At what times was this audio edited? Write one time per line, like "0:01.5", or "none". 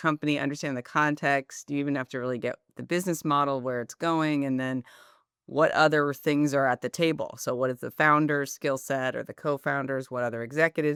none